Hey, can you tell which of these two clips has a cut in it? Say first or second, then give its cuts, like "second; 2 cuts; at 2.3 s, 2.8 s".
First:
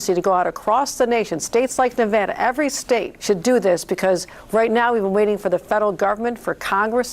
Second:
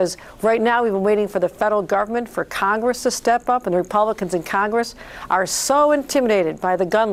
first; 1 cut; at 3.1 s